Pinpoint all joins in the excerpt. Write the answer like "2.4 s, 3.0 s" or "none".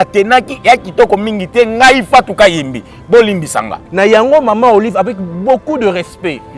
3.8 s